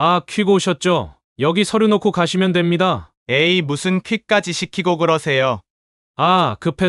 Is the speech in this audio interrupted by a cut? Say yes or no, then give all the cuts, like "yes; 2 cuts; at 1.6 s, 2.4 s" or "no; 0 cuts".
yes; 2 cuts; at 1.2 s, 3.1 s